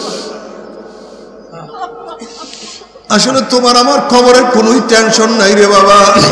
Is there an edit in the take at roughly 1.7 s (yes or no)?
yes